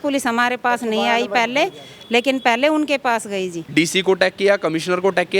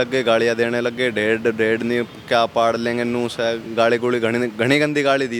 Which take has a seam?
first; 1 cut; at 3.6 s

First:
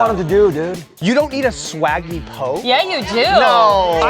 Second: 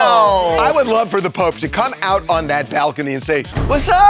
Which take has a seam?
first; 1 cut; at 1.0 s

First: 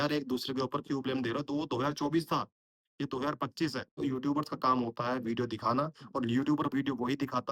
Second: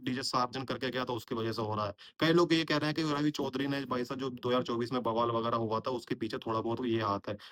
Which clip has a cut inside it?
first; 1 cut; at 4.0 s

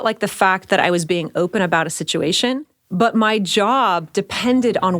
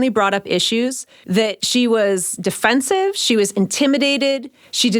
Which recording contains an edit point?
second; 1 cut; at 1.4 s

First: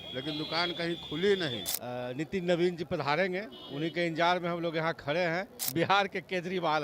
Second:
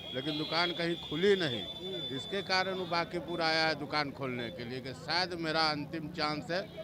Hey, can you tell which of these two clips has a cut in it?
first; 2 cuts; at 1.7 s, 5.6 s

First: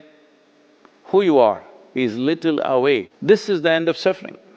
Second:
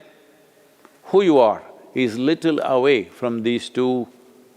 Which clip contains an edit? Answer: first; 1 cut; at 3.1 s

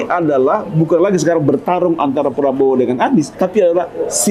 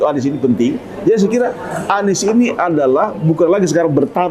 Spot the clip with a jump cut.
first; 1 cut; at 3.3 s

